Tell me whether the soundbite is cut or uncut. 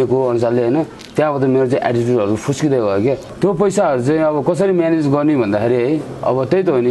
cut